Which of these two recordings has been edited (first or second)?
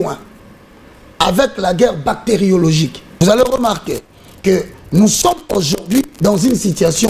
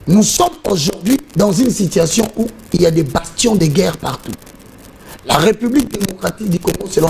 first